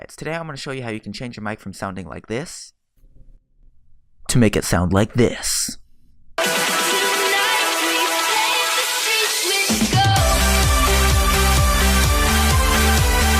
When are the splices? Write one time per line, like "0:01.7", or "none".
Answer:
none